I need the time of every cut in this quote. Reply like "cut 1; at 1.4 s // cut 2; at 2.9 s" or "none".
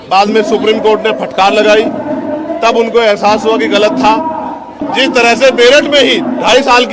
cut 1; at 4.7 s